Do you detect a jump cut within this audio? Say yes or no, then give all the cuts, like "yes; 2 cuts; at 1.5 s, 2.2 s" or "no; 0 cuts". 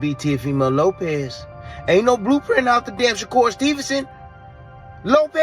yes; 1 cut; at 3.0 s